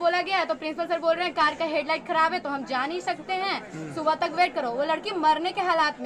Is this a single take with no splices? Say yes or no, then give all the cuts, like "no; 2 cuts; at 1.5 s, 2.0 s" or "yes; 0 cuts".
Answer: yes; 0 cuts